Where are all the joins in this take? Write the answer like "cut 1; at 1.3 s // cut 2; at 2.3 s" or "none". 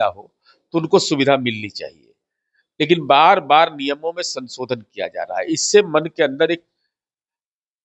none